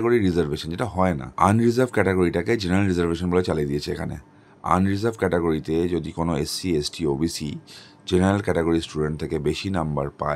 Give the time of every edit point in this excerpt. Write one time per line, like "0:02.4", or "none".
0:01.3